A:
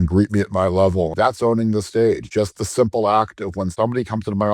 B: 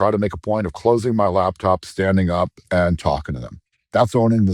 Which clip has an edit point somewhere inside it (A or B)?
A